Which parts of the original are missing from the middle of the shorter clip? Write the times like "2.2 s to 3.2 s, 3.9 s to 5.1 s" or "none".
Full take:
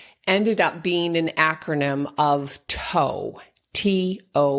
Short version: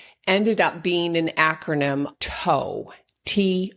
2.1 s to 2.6 s